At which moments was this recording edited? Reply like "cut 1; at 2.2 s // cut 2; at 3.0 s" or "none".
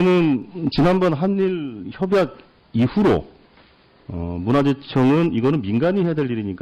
cut 1; at 2.4 s

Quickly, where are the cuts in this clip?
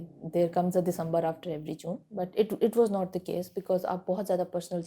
none

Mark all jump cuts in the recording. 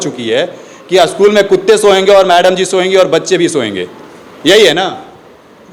none

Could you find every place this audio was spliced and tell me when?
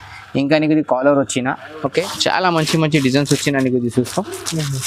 cut 1; at 2.1 s

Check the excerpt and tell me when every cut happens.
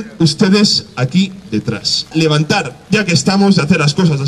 cut 1; at 2.1 s

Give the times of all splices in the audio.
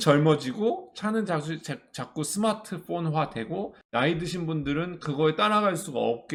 none

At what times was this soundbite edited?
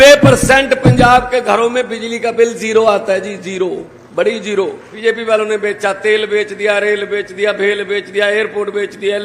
cut 1; at 4.9 s

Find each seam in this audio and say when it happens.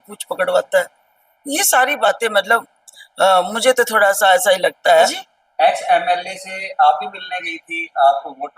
cut 1; at 5.1 s

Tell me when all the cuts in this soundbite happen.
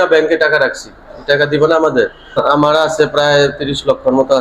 cut 1; at 2.2 s

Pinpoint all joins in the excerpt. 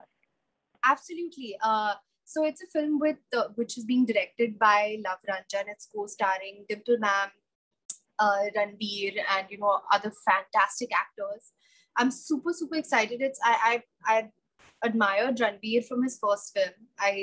none

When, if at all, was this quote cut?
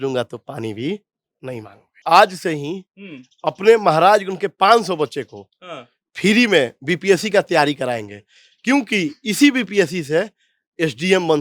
cut 1; at 1.9 s

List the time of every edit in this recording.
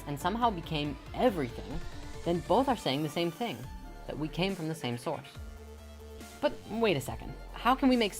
cut 1; at 4.8 s

